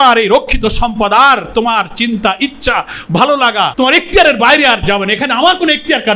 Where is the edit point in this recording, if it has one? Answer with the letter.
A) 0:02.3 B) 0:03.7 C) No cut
B